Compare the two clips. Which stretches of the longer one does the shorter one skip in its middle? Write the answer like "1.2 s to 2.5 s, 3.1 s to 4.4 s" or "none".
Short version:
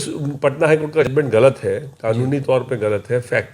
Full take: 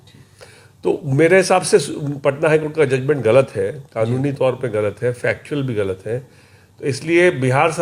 2.9 s to 3.0 s